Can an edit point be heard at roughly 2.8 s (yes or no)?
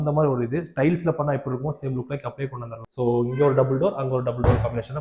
yes